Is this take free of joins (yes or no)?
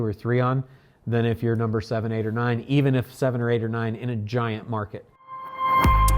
no